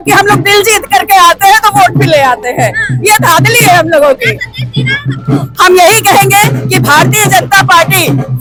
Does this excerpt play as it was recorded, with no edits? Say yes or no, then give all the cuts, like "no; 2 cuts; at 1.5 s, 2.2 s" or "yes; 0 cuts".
yes; 0 cuts